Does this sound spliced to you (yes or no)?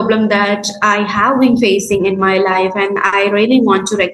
no